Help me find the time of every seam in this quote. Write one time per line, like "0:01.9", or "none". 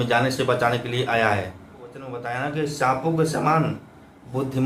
0:02.2